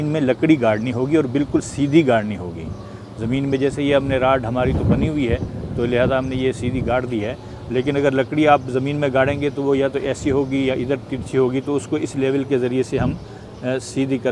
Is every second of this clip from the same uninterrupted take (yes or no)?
yes